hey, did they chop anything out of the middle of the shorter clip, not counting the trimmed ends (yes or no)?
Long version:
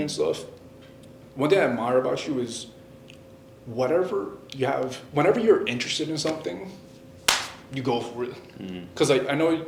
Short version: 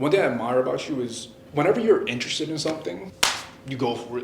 yes